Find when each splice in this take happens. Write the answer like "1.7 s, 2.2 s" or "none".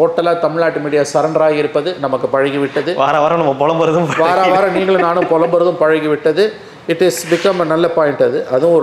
none